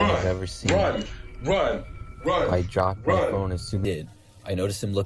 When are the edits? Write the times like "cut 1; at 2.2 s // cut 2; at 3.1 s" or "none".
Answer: cut 1; at 3.8 s